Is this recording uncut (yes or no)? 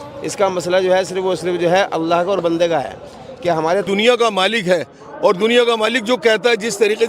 no